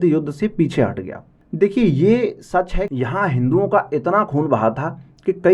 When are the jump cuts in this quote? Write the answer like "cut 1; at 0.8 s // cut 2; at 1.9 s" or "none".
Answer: cut 1; at 2.8 s